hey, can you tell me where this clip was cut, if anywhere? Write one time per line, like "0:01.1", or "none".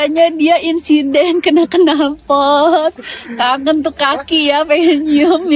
none